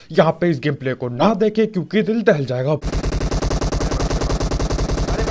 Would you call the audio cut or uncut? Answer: cut